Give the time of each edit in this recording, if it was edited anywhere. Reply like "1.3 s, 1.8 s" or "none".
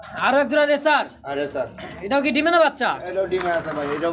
none